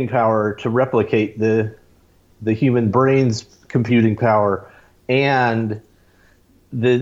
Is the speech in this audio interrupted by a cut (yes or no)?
no